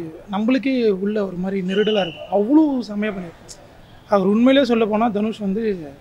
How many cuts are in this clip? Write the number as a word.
zero